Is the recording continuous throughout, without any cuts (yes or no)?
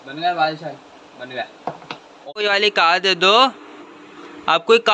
no